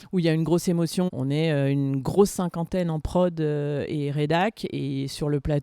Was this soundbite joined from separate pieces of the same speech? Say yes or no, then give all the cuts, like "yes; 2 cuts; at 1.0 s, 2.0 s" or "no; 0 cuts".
yes; 1 cut; at 1.1 s